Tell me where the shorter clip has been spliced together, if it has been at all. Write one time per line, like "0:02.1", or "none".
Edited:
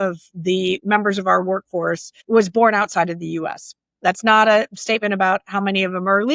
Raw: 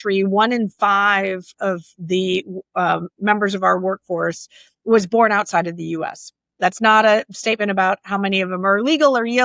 0:00.8
0:02.1

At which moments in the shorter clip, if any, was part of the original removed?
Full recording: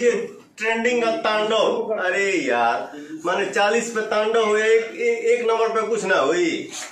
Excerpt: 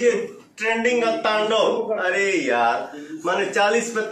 none

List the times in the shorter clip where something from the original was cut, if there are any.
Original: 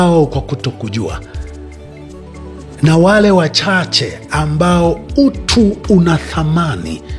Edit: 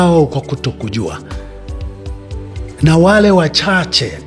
none

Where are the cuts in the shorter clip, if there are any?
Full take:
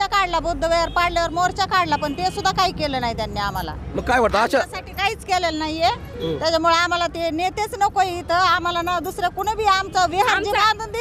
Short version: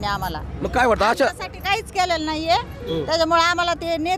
none

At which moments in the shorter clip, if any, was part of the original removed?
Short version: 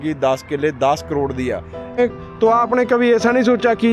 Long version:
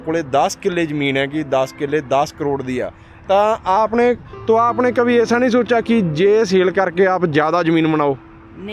0:02.0

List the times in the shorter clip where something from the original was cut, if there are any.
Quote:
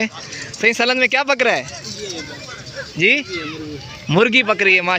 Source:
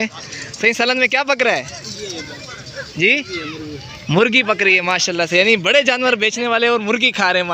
none

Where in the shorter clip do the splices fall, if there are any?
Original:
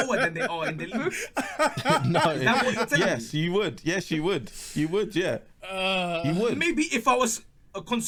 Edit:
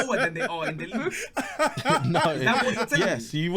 none

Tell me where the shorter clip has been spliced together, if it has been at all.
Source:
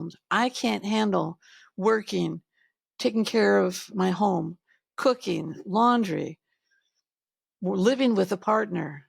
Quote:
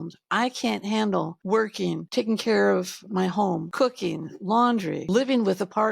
0:01.6
0:03.1
0:05.1

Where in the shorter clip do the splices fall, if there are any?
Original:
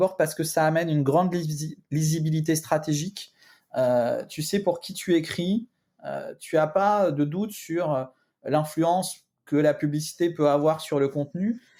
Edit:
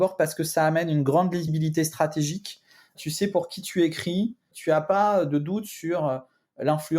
0:01.5
0:02.9
0:04.5

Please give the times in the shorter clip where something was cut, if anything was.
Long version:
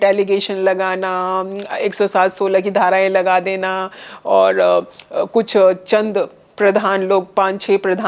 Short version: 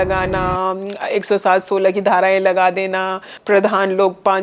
0:03.3

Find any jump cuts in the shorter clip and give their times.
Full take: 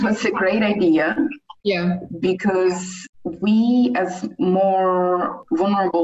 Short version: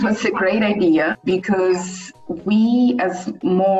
0:01.1

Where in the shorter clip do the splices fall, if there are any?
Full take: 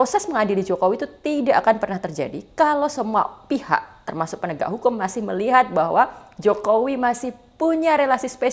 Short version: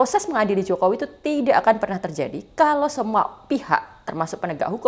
none

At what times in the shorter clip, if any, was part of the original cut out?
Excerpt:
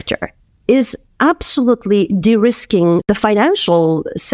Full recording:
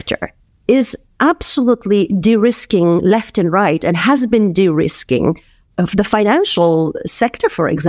0:03.0

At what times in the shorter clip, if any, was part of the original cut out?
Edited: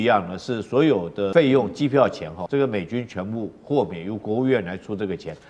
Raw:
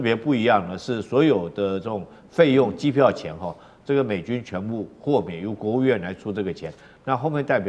0:01.3
0:02.3

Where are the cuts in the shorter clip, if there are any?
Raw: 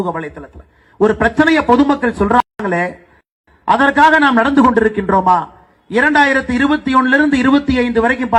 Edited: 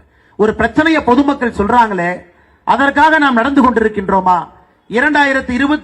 0:01.9

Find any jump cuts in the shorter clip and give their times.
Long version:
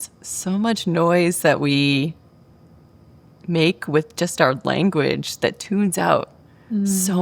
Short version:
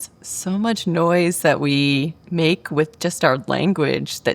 0:02.2

